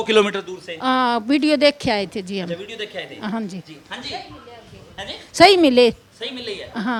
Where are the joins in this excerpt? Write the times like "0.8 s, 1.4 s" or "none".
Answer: none